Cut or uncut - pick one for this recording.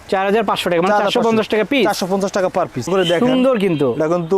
cut